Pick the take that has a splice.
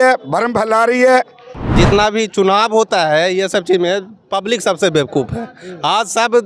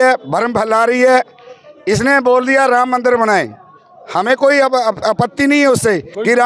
first; 1 cut; at 1.6 s

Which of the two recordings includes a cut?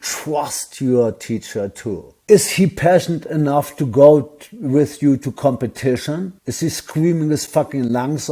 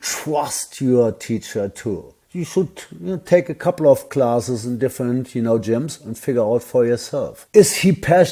first; 1 cut; at 2.1 s

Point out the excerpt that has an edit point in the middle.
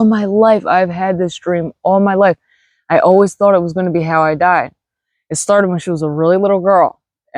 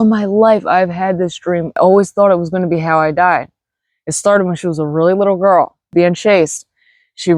second; 2 cuts; at 1.8 s, 5.9 s

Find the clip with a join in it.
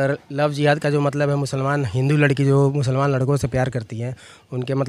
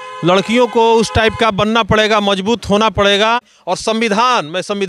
second; 1 cut; at 3.5 s

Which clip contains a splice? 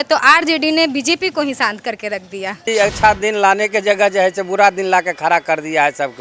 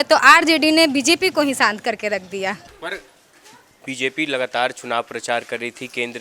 first; 1 cut; at 2.6 s

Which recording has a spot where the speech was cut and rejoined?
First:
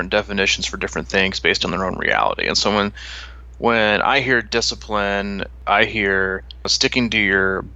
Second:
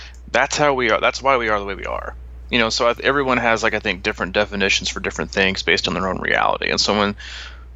first; 2 cuts; at 5.5 s, 6.7 s

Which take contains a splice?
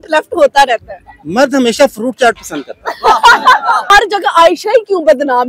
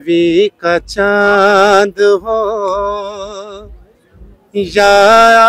first; 1 cut; at 3.9 s

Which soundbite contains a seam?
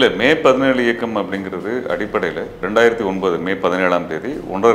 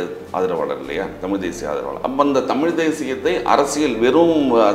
first; 1 cut; at 2.6 s

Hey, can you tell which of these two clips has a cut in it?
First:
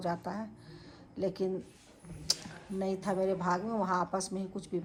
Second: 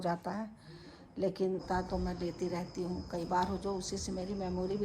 second; 1 cut; at 1.6 s

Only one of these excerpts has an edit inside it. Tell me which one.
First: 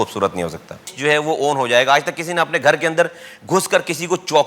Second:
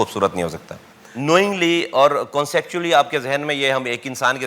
first; 1 cut; at 0.9 s

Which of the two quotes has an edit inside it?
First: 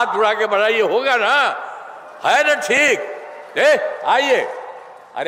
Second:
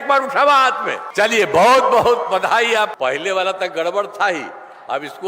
second; 2 cuts; at 1.0 s, 2.9 s

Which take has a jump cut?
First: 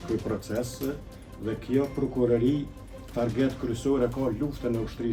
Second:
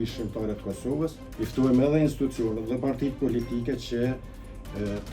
second; 1 cut; at 1.2 s

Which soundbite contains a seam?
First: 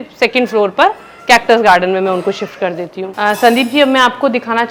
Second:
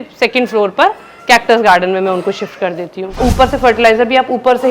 second; 1 cut; at 3.2 s

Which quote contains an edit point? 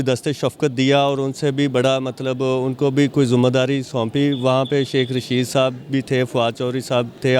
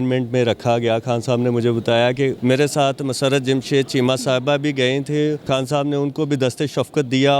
second; 2 cuts; at 2.4 s, 5.4 s

